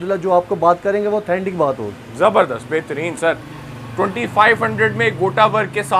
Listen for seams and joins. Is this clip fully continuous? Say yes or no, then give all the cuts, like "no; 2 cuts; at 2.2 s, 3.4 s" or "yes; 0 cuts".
yes; 0 cuts